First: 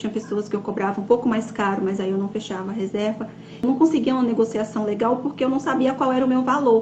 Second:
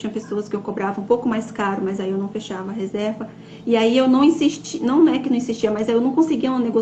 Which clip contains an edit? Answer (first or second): first